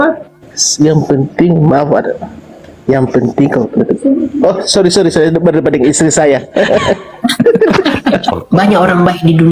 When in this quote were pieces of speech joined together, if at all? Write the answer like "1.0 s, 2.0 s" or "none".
8.3 s